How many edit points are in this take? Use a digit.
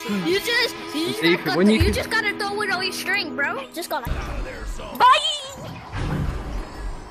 1